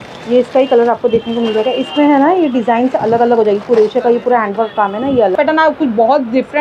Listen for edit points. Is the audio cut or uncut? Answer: cut